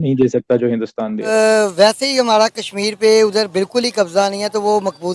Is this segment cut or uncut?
cut